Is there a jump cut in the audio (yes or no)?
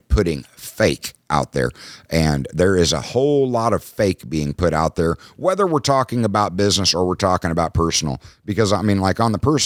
no